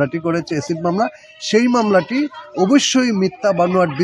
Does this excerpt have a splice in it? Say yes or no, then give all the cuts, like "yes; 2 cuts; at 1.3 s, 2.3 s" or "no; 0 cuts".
no; 0 cuts